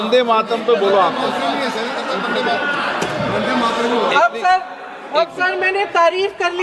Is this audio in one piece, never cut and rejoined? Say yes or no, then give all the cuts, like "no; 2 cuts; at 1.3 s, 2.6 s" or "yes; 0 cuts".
yes; 0 cuts